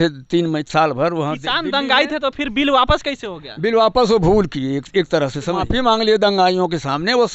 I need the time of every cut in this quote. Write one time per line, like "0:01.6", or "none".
0:05.6